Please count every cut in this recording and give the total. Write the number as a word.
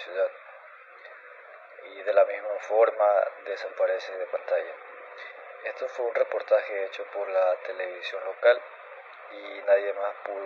zero